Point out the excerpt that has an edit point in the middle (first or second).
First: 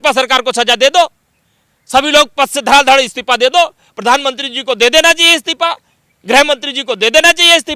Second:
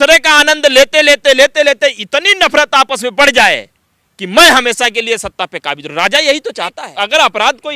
second